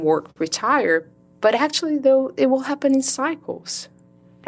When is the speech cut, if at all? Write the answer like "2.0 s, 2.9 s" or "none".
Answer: none